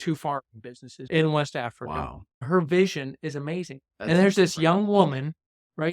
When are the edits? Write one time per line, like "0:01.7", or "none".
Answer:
0:02.4